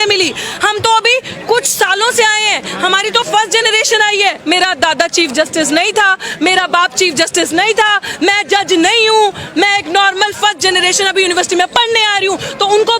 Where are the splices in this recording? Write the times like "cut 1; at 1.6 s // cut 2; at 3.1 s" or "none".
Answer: cut 1; at 4.4 s